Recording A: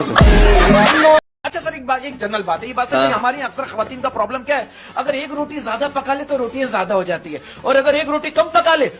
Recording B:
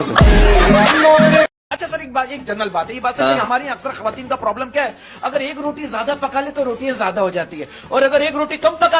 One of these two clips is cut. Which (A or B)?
A